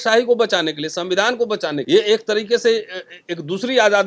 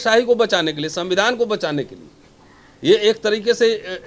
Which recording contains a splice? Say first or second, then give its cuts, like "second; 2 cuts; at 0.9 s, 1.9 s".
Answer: first; 1 cut; at 1.8 s